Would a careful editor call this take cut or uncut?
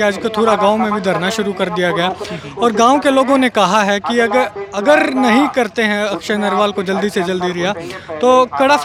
uncut